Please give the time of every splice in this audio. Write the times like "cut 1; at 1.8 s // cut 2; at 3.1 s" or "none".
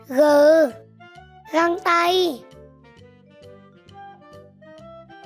cut 1; at 2.4 s

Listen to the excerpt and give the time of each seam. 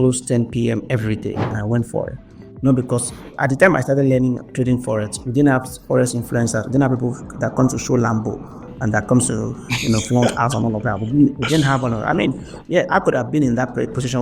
cut 1; at 1.5 s

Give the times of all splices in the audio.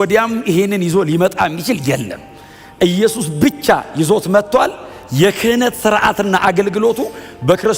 none

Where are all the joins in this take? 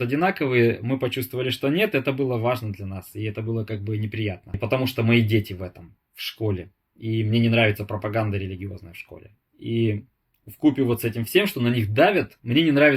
none

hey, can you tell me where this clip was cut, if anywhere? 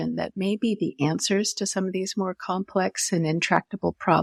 none

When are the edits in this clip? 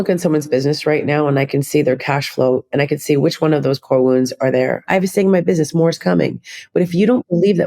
cut 1; at 4.8 s

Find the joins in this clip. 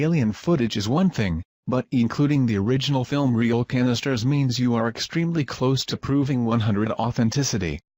cut 1; at 2.1 s

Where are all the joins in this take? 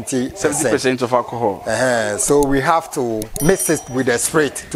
cut 1; at 1.6 s // cut 2; at 3.3 s

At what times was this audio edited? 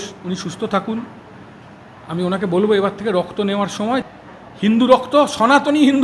cut 1; at 4.1 s

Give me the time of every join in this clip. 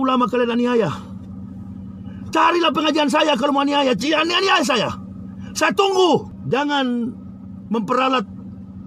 cut 1; at 6.3 s

